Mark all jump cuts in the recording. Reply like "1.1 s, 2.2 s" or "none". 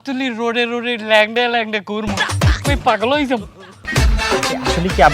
3.8 s

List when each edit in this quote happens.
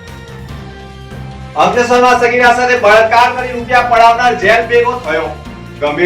0.9 s

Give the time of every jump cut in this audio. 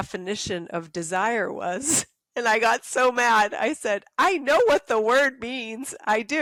none

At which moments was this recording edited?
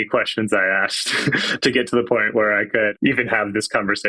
2.9 s

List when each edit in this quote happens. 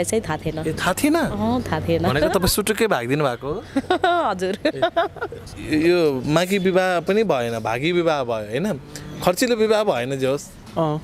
none

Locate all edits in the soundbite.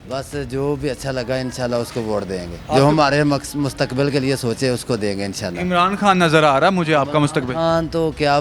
2.5 s

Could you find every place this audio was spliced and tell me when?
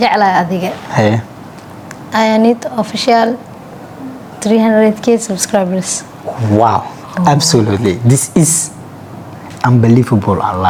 none

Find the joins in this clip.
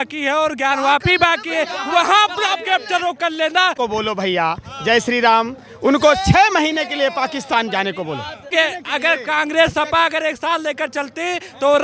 3.8 s, 8.4 s

